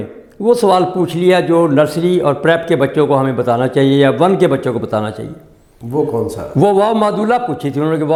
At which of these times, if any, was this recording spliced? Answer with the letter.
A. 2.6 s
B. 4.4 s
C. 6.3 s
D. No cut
D